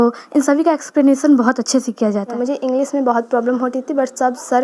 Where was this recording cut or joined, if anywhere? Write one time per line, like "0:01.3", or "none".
0:02.3